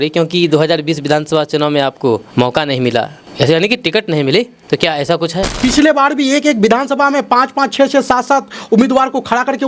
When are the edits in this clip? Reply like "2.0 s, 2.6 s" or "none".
2.3 s, 3.2 s, 4.6 s, 5.5 s